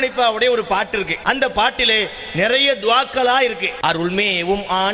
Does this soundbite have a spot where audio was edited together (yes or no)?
yes